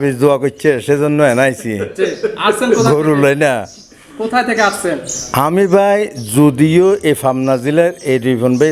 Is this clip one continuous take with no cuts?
yes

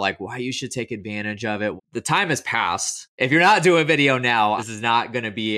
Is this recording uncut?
no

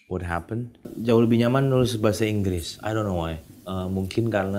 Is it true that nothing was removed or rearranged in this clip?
no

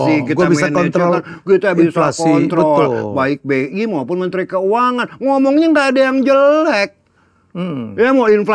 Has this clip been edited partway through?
no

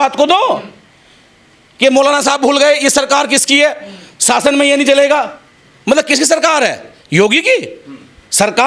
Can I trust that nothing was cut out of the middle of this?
yes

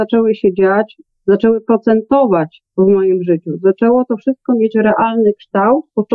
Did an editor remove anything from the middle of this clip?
yes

